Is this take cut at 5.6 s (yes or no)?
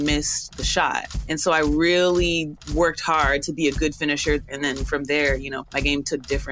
yes